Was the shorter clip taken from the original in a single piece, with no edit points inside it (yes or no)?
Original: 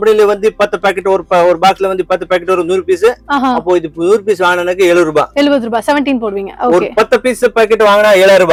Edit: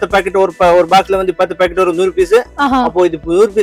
yes